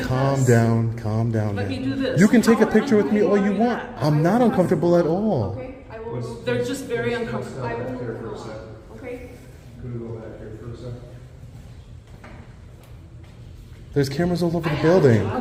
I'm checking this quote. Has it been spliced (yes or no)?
no